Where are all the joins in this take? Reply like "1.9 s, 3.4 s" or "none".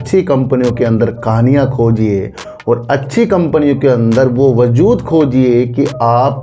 none